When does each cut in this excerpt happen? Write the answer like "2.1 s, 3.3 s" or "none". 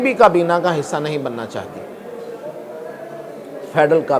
none